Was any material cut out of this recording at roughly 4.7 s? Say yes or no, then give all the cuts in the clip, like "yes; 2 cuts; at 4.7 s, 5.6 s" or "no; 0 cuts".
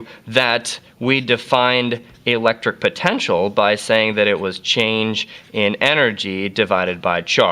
no; 1 cut; at 3.4 s